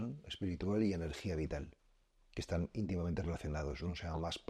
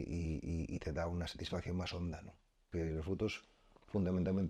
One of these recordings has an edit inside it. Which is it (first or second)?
second